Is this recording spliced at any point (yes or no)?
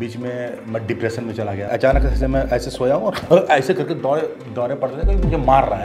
yes